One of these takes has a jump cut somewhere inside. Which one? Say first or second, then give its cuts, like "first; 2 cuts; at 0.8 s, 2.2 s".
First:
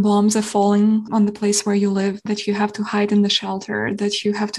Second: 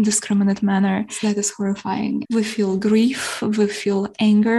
second; 2 cuts; at 1.1 s, 2.2 s